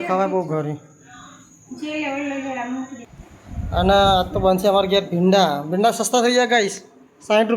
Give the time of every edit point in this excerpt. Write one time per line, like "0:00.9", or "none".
0:03.0